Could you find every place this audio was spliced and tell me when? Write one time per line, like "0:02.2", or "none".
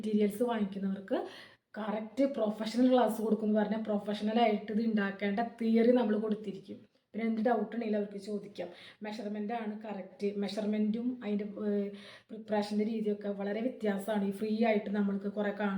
none